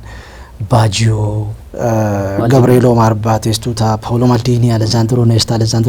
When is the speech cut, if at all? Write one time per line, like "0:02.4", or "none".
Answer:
0:01.5